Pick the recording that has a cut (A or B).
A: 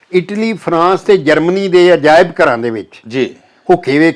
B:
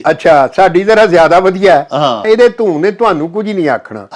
B